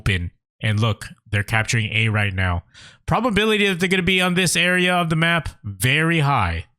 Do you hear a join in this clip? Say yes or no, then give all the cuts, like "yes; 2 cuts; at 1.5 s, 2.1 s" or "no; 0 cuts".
no; 0 cuts